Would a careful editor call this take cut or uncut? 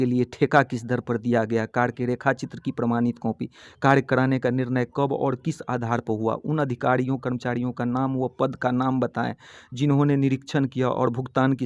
uncut